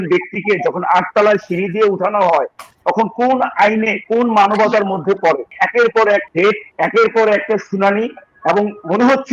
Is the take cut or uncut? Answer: cut